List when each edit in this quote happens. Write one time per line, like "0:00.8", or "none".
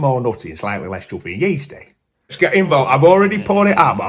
0:02.3

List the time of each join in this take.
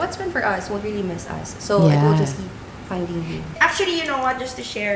none

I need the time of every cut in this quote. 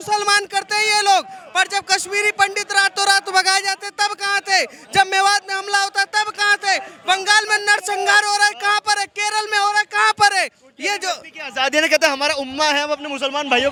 none

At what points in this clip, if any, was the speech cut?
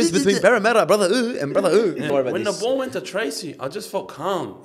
0:02.1

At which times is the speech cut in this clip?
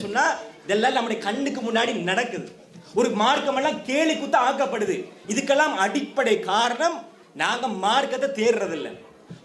none

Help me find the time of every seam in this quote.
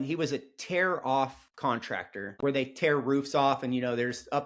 0:02.3

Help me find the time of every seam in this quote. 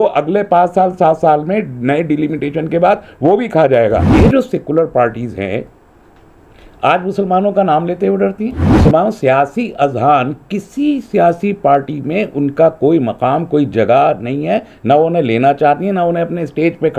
0:04.1
0:08.7

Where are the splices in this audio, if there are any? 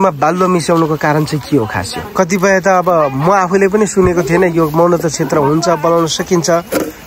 0:02.0

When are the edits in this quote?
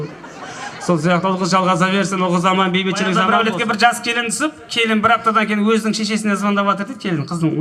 0:03.2

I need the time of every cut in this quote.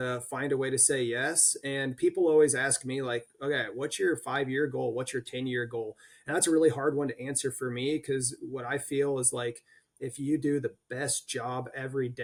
none

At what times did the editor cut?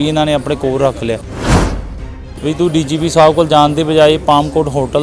0:01.8

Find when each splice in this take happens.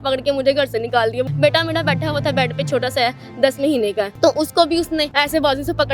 0:01.3
0:04.1
0:05.1

